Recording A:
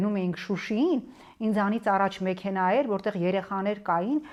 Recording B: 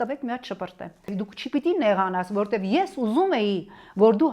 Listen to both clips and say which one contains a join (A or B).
B